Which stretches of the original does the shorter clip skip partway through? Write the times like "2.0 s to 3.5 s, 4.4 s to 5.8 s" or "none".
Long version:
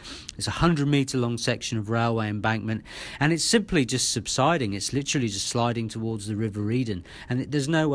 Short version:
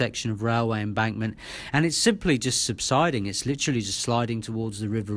none